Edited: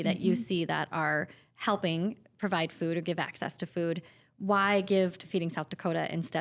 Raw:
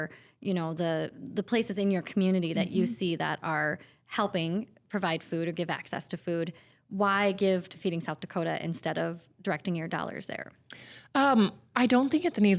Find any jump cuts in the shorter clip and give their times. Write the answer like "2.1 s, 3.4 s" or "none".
none